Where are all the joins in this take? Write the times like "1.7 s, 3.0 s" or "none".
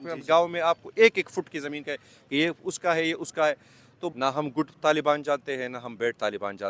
4.1 s